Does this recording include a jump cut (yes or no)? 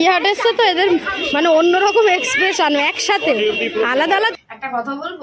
yes